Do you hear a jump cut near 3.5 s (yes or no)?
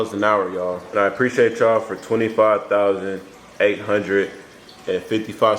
no